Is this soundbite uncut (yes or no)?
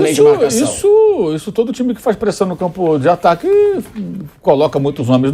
yes